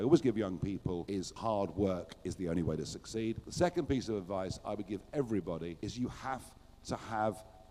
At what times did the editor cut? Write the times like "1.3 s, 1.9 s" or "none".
1.3 s, 3.4 s